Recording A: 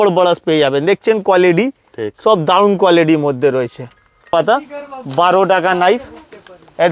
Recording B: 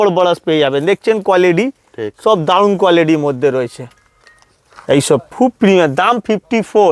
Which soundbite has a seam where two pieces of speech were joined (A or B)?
A